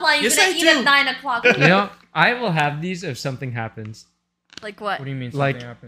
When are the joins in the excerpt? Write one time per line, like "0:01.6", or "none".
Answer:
0:01.4